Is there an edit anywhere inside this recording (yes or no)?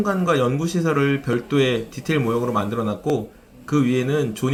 no